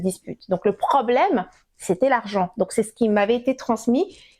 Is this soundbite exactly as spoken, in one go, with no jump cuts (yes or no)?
yes